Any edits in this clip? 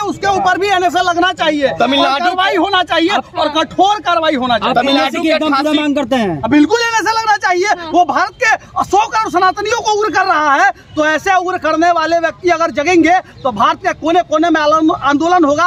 no; 0 cuts

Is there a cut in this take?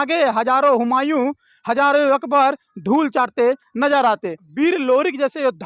yes; 1 cut; at 4.4 s

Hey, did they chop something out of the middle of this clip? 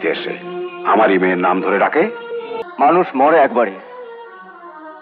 yes; 1 cut; at 2.5 s

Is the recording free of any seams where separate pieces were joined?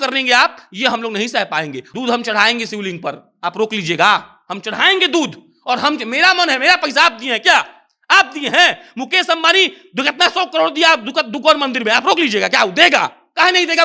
no; 1 cut; at 1.8 s

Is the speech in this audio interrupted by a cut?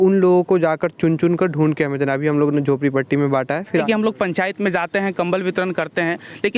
yes; 1 cut; at 3.8 s

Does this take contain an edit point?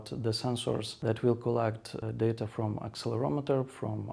yes; 2 cuts; at 0.9 s, 2.0 s

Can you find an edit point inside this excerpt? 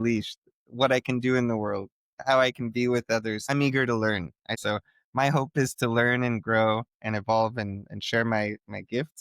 yes; 2 cuts; at 3.4 s, 4.5 s

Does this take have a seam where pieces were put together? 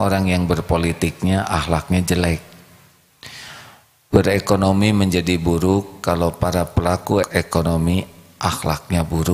yes; 1 cut; at 7.2 s

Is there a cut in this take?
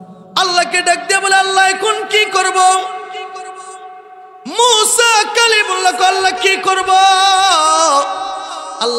no; 0 cuts

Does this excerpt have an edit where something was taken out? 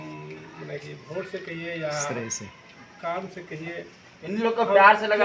no; 0 cuts

